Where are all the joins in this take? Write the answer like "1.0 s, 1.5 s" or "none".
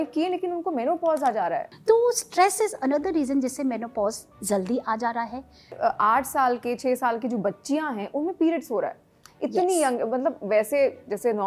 1.7 s, 5.7 s